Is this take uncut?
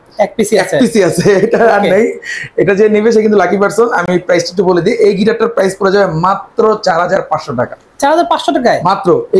yes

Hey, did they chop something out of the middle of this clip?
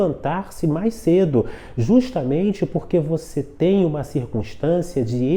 no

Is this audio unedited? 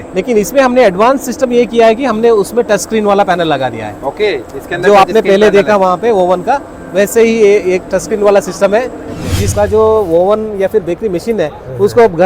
no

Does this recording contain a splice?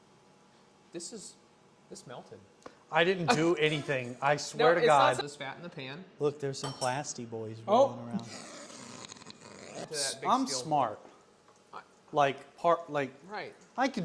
yes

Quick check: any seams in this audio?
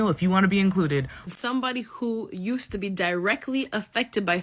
yes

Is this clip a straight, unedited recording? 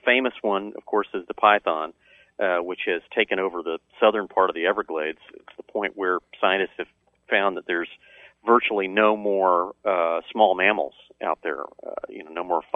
yes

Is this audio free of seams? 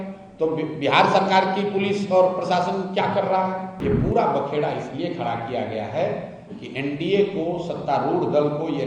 no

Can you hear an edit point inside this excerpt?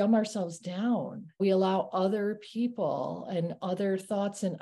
yes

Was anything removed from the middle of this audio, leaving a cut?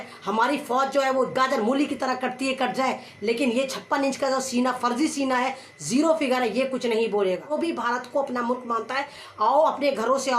yes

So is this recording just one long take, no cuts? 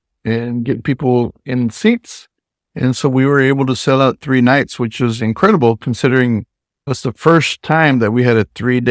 yes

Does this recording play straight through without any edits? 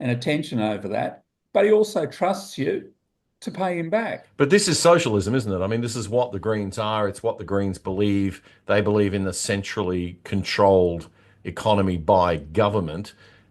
no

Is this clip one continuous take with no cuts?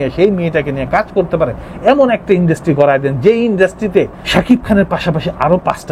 no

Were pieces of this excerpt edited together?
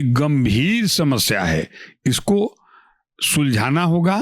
no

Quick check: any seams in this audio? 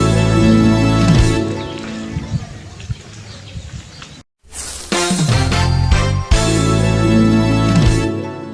yes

